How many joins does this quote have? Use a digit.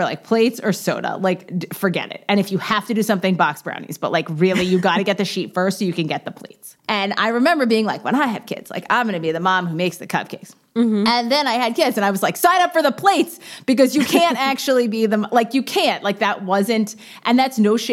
1